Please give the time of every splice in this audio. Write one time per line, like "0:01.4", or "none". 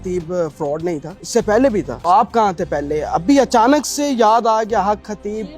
0:01.1
0:01.9